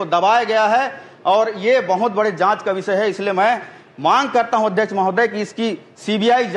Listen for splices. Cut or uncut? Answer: uncut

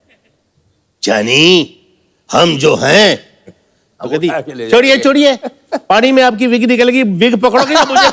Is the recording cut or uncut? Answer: uncut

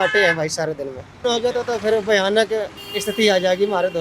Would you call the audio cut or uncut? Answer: cut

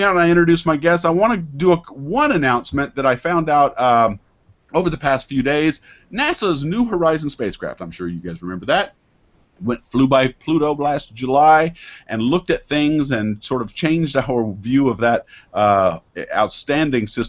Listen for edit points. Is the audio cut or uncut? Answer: cut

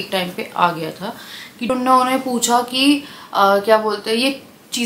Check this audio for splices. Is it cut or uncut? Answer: cut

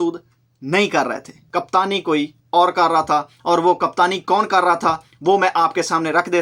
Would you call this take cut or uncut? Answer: cut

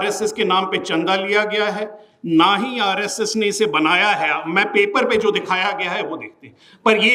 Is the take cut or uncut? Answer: uncut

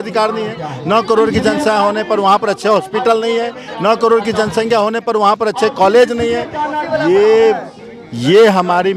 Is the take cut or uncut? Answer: uncut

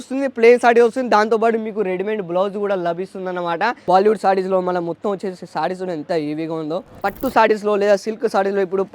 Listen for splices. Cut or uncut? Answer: cut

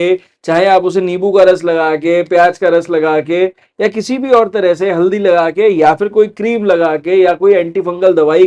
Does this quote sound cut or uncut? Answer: uncut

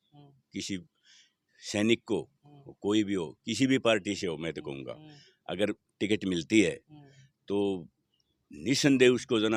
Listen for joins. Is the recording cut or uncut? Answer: uncut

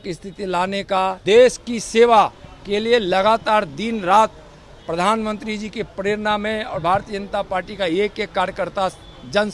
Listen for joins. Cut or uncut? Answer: cut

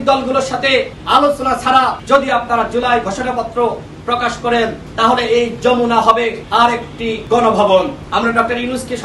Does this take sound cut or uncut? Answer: cut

